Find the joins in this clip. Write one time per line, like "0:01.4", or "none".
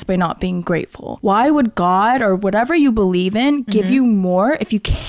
0:01.0